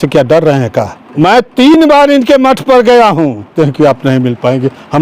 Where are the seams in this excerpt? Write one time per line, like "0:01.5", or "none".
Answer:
0:01.0
0:03.5